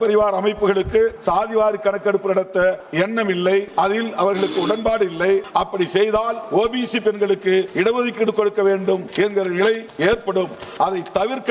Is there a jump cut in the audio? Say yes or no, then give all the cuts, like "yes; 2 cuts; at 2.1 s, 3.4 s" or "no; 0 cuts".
yes; 8 cuts; at 1.2 s, 2.8 s, 3.7 s, 5.5 s, 6.4 s, 7.7 s, 9.1 s, 9.9 s